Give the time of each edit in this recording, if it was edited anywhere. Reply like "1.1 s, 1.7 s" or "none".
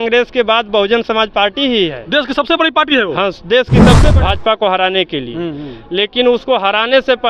4.0 s

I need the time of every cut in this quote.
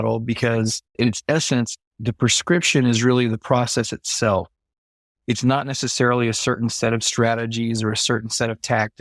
0.9 s

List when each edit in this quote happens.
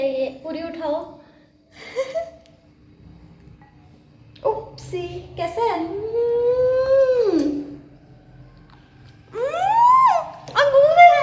none

